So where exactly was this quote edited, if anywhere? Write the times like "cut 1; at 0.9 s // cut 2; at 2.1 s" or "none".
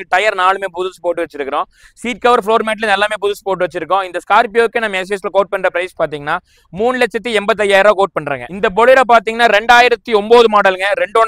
none

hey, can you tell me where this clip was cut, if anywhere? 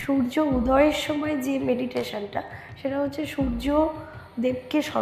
none

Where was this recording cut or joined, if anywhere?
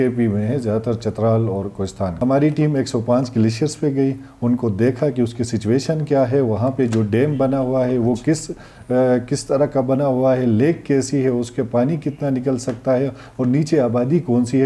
cut 1; at 2.1 s

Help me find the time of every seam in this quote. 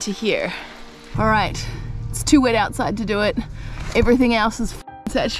cut 1; at 1.2 s

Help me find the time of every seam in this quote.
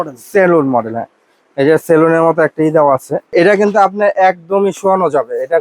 cut 1; at 3.3 s

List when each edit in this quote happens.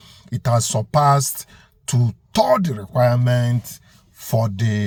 none

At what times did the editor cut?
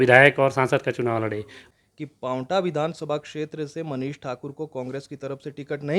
cut 1; at 1.6 s

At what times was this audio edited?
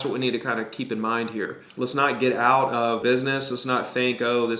cut 1; at 1.6 s // cut 2; at 3.0 s

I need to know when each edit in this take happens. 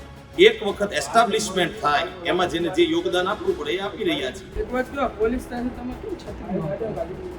cut 1; at 4.4 s

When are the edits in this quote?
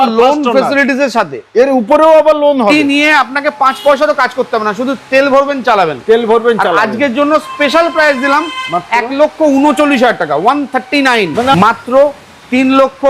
cut 1; at 2.7 s // cut 2; at 11.6 s

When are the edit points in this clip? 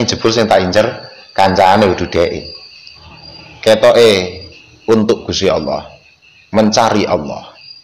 cut 1; at 3.0 s

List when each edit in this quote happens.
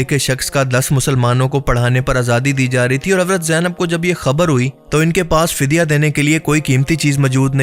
none

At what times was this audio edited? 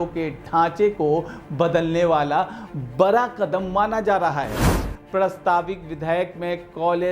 cut 1; at 4.7 s

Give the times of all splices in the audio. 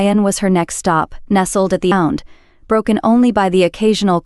cut 1; at 1.9 s

